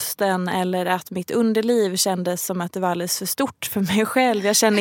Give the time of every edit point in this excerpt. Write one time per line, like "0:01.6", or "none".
none

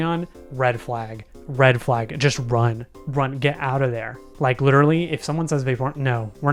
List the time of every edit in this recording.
none

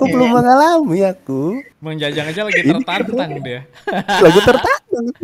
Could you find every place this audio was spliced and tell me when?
none

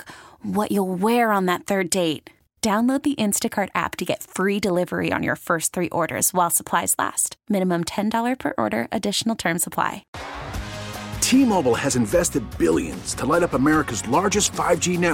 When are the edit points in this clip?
0:10.1

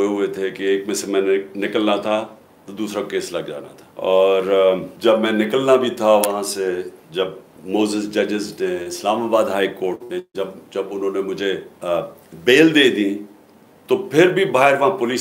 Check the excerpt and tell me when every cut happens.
0:03.8
0:04.9
0:07.5
0:11.7

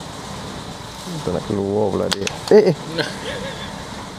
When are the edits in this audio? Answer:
0:03.2

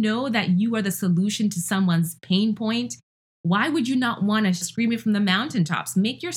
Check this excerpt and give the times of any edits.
0:04.7

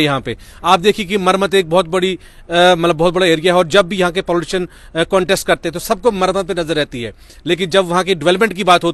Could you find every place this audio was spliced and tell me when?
none

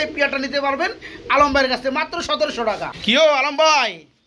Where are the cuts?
none

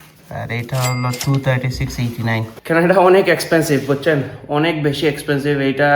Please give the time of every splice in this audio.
0:02.5

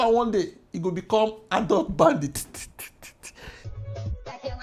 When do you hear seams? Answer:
0:03.6

